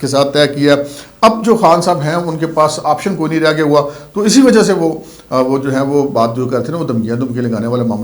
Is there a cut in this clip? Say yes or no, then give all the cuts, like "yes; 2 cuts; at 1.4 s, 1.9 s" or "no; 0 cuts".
no; 0 cuts